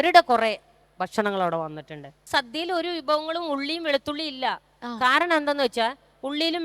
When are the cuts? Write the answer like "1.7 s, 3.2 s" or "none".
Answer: 2.3 s